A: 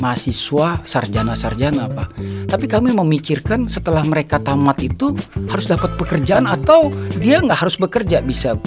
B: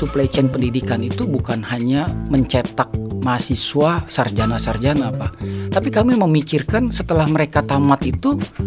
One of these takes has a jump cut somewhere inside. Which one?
A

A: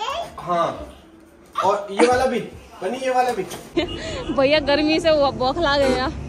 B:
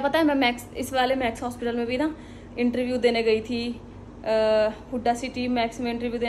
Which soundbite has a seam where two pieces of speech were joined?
A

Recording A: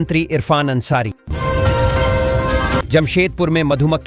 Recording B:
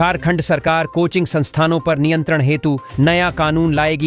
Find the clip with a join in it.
A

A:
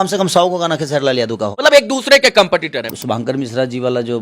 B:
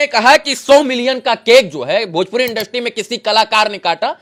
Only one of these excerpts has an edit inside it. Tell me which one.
A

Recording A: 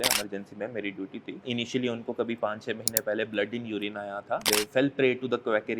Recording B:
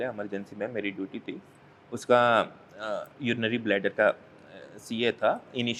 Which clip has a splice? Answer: A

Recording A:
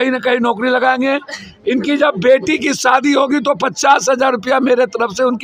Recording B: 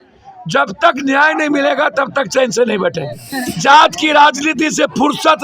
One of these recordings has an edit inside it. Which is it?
B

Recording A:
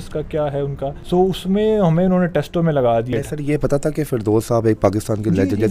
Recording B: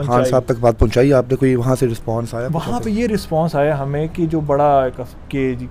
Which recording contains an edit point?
A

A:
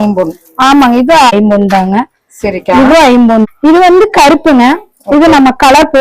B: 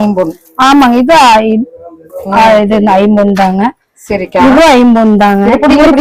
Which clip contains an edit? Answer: A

